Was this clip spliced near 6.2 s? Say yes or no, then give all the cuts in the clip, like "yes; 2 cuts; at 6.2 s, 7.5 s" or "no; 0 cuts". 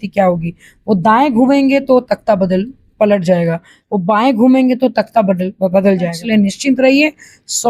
yes; 1 cut; at 6.2 s